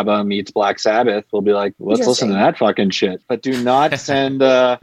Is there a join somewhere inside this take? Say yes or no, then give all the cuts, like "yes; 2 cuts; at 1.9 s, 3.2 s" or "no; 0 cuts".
yes; 2 cuts; at 1.8 s, 3.2 s